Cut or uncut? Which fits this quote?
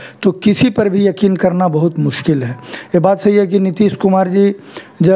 uncut